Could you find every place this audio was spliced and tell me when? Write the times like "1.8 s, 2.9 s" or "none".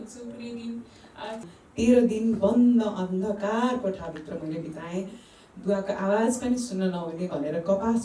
1.5 s